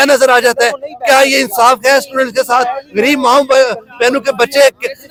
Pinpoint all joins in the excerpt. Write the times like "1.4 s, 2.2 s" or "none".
none